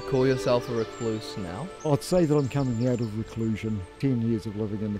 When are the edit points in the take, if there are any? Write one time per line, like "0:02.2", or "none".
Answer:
0:01.9
0:03.9